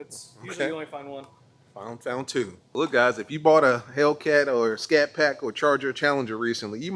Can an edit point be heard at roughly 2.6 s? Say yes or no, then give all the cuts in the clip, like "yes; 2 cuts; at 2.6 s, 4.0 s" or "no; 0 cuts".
yes; 1 cut; at 2.6 s